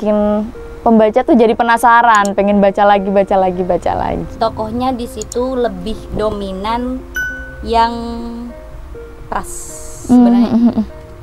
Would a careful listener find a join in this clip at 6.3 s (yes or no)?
no